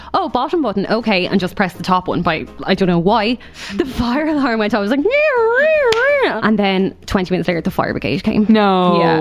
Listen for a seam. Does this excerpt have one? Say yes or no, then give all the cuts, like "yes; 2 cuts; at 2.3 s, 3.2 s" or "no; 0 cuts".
yes; 2 cuts; at 3.5 s, 6.3 s